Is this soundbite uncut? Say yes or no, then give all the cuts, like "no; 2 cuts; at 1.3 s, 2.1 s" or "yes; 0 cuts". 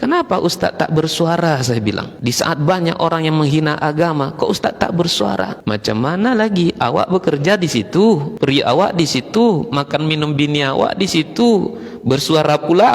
no; 3 cuts; at 2.1 s, 5.6 s, 8.3 s